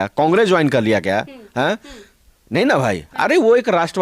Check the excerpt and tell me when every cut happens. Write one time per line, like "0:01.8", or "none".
none